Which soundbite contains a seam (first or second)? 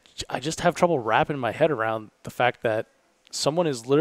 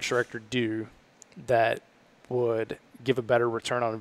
second